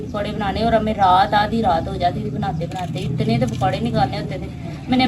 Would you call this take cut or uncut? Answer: uncut